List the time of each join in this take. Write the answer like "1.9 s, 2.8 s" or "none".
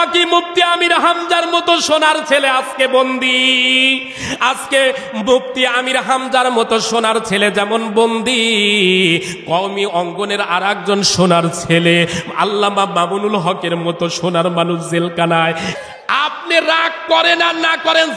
15.7 s

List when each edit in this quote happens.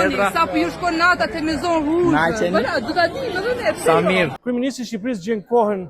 4.4 s

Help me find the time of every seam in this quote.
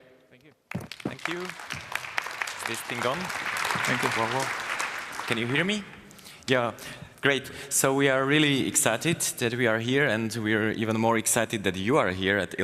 6.6 s

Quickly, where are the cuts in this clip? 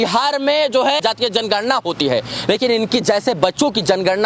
1.0 s

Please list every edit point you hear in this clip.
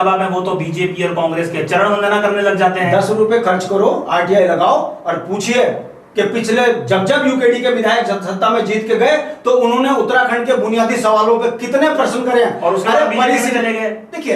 none

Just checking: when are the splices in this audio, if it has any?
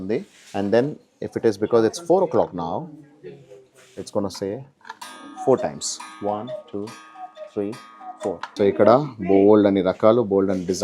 8.5 s

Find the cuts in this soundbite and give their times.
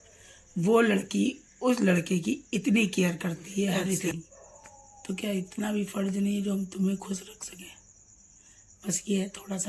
3.8 s

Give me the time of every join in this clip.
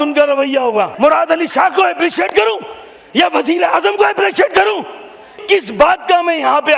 0.9 s, 5.3 s

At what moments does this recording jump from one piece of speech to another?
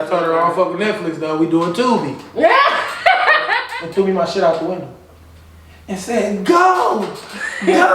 3.5 s

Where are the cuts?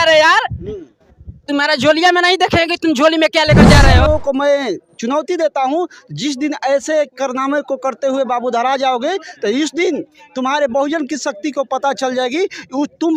3.9 s

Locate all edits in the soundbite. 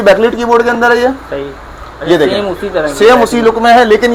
none

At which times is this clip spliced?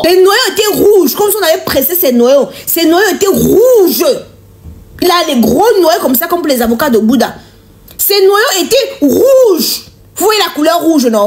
none

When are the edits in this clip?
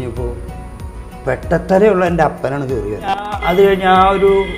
3.3 s

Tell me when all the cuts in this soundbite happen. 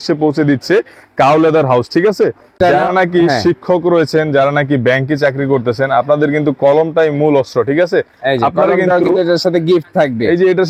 2.5 s

